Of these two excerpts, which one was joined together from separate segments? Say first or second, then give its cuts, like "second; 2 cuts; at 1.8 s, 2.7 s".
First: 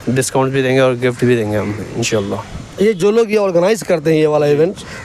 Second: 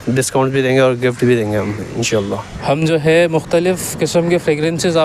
second; 1 cut; at 2.5 s